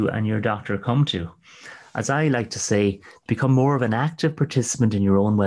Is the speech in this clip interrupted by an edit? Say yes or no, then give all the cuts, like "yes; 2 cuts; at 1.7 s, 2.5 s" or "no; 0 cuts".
no; 0 cuts